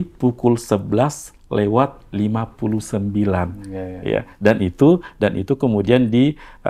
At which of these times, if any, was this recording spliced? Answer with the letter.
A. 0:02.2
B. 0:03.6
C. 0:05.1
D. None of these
D